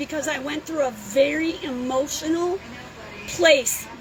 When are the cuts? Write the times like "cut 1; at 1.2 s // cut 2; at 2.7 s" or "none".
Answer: none